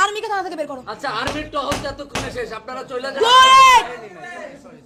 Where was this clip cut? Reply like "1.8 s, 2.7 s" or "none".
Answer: none